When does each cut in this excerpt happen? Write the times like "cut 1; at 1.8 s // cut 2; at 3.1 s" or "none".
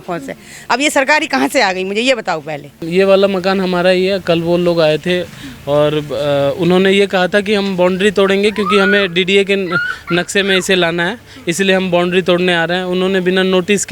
cut 1; at 2.8 s